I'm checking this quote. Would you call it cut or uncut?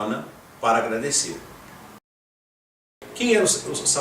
cut